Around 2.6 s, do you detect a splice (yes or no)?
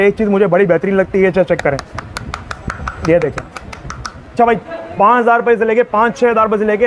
no